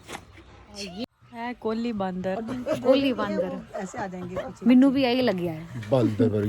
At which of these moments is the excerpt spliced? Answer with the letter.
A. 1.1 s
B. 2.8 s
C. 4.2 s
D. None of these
A